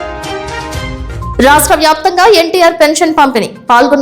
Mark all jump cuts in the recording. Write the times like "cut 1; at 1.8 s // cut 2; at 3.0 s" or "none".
cut 1; at 1.0 s